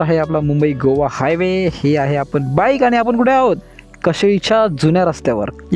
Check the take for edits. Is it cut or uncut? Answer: uncut